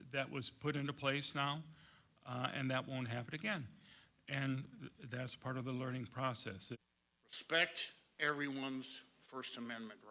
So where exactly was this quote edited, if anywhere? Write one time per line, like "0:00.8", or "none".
0:06.8